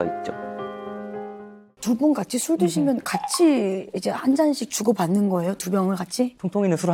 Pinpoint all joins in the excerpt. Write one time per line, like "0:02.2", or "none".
0:01.7